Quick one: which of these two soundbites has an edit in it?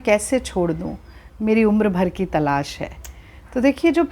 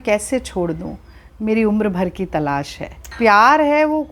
second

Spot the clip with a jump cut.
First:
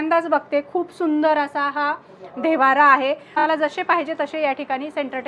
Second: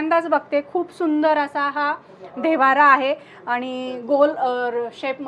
first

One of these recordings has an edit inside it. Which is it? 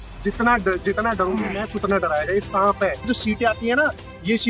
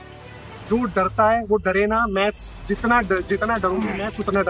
first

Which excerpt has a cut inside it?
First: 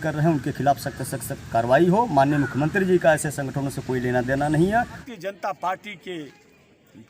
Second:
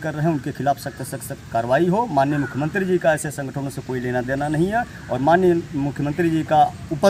first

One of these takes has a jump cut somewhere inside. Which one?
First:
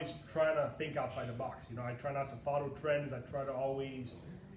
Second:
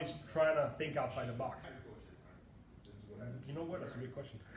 second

